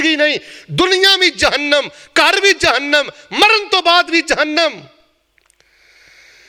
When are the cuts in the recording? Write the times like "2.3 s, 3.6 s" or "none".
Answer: none

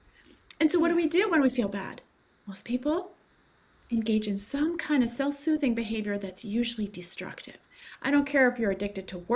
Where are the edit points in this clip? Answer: none

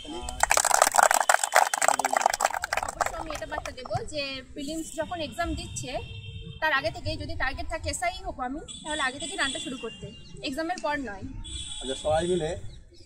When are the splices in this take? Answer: 3.2 s

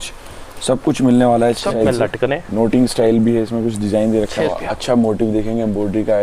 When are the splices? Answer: 1.7 s, 4.5 s

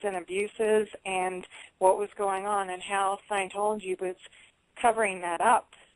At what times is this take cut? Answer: 4.2 s

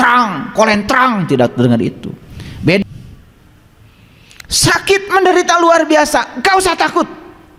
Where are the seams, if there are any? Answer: 2.8 s

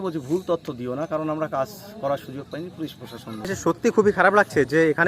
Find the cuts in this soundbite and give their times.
3.5 s

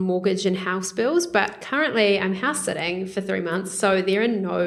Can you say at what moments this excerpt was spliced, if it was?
none

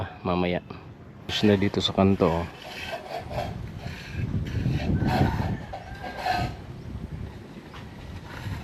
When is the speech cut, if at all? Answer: 1.3 s

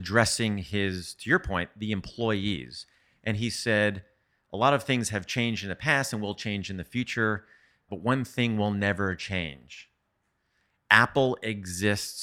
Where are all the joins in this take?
none

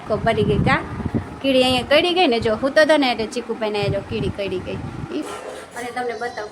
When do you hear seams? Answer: 5.2 s

